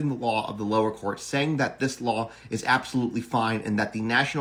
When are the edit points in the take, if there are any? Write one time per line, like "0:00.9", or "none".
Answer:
none